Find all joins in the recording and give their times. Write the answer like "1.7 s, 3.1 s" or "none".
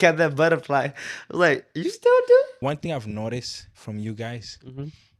2.5 s